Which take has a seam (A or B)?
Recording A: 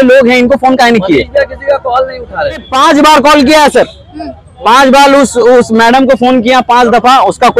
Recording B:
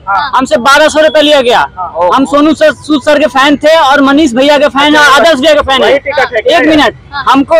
A